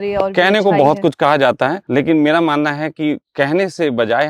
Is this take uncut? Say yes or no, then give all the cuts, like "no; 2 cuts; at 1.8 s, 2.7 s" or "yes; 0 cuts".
no; 1 cut; at 1.8 s